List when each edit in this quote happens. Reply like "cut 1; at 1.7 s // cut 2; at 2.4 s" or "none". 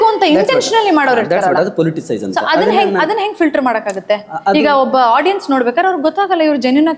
none